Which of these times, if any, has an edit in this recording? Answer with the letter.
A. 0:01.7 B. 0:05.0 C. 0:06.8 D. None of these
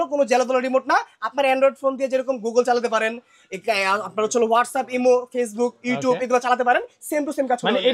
D